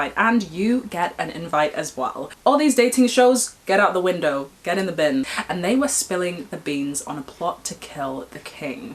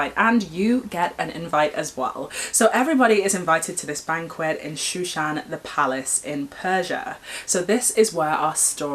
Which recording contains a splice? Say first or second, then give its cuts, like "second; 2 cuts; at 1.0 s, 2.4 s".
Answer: first; 2 cuts; at 2.3 s, 5.3 s